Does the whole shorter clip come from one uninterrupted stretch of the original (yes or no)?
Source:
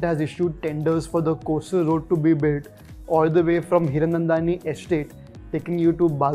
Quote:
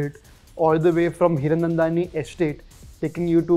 yes